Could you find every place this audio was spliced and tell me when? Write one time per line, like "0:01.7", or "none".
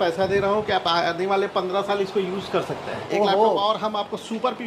0:03.0